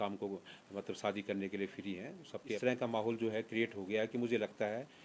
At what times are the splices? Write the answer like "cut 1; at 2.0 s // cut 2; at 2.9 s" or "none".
cut 1; at 2.6 s